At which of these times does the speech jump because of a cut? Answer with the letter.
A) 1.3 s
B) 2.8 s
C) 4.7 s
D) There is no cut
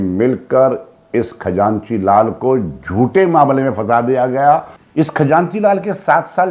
C